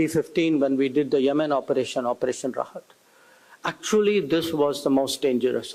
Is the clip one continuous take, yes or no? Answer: yes